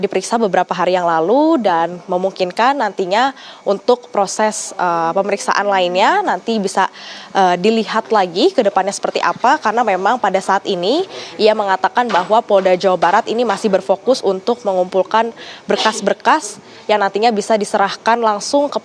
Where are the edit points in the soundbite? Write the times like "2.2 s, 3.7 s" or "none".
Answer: none